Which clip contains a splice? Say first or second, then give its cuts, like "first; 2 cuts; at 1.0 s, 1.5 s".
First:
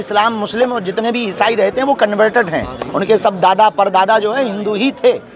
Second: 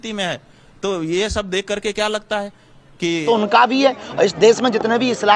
second; 1 cut; at 3.2 s